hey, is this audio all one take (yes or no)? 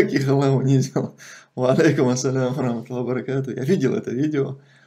yes